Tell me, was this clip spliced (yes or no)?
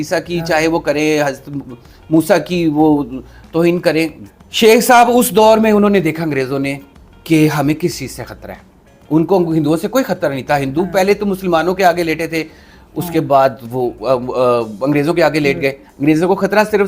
yes